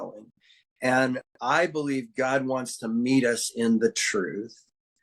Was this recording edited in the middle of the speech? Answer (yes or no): no